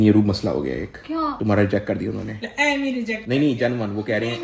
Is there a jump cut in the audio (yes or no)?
no